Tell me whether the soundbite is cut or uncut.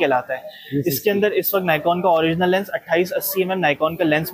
uncut